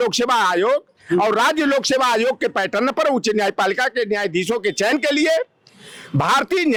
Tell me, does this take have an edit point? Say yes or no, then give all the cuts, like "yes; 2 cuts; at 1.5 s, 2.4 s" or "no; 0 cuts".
no; 0 cuts